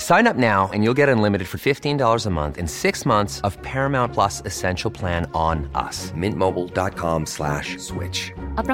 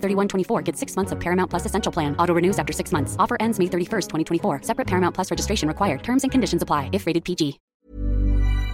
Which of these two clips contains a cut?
second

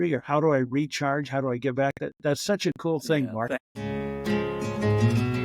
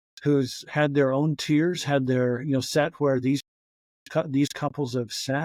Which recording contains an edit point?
first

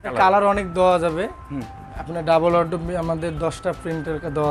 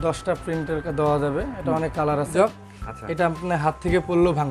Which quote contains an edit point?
second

